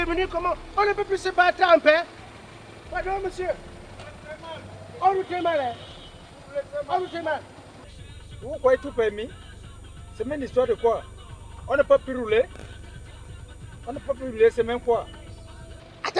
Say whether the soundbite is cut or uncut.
cut